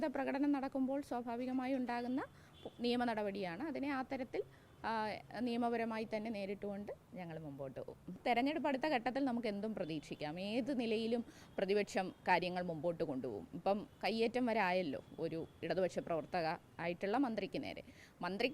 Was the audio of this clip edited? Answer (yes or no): yes